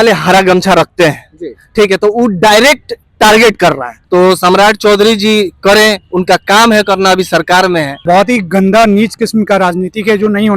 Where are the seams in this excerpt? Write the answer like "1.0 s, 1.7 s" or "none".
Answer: 3.9 s, 8.0 s